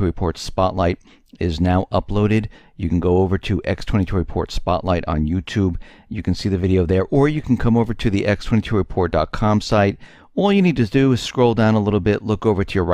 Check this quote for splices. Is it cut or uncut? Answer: cut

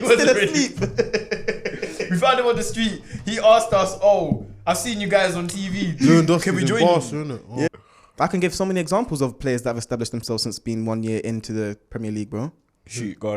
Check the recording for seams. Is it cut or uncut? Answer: cut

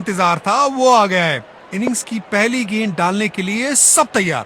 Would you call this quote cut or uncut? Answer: uncut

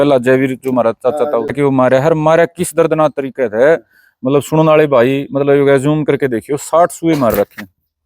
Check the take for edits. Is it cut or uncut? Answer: cut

